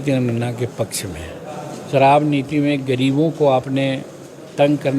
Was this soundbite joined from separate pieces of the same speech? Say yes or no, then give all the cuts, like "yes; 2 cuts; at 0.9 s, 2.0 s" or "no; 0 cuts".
yes; 1 cut; at 1.7 s